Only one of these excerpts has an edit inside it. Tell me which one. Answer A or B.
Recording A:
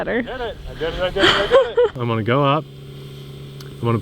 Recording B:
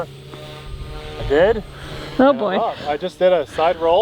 A